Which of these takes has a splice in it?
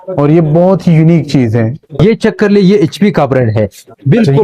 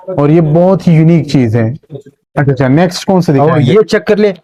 first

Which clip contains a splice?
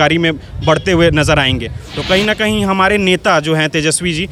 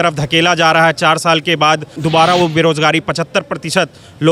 second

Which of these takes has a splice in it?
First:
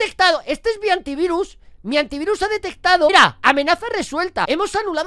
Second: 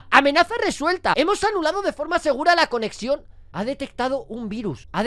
second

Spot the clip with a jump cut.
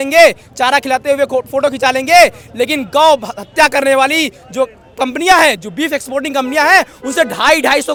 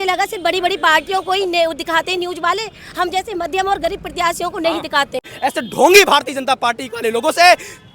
second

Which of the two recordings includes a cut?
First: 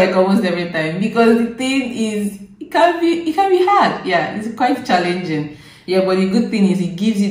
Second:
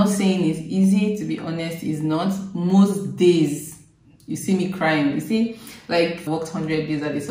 second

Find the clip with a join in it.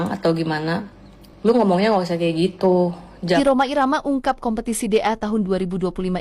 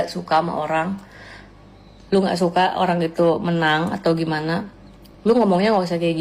first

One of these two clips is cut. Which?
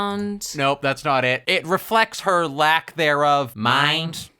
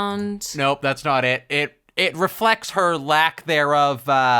first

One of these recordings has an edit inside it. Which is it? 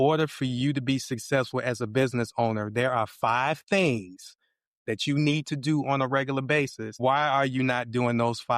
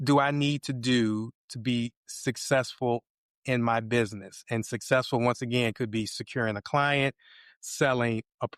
first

